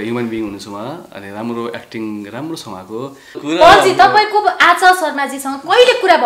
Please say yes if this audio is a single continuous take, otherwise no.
no